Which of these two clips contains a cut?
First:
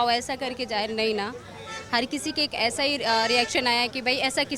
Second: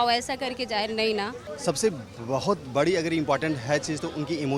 second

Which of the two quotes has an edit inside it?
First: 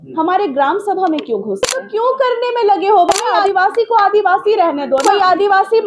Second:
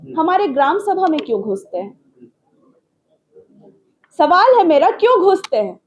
first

